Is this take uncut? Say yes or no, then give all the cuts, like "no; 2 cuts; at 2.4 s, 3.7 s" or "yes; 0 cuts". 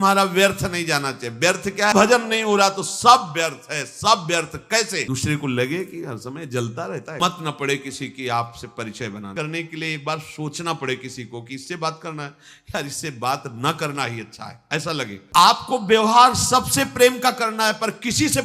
no; 5 cuts; at 1.9 s, 5.0 s, 7.2 s, 9.3 s, 15.2 s